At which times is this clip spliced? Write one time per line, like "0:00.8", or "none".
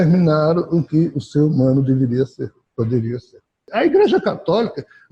0:03.6